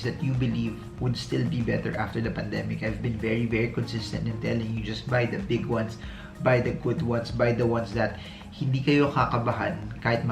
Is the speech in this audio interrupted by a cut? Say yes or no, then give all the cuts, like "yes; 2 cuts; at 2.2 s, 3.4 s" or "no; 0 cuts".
no; 0 cuts